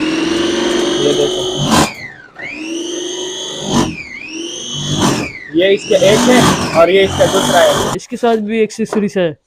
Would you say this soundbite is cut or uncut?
cut